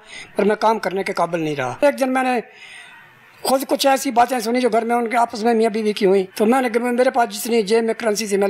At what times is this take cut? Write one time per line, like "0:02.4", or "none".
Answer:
0:01.8
0:06.3